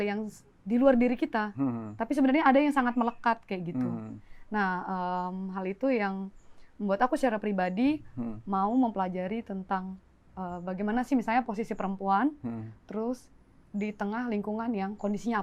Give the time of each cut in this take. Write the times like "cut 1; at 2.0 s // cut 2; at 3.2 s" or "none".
none